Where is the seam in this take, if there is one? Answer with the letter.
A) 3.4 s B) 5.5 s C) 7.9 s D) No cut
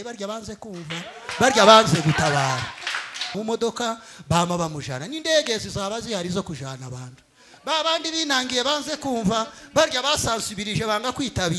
A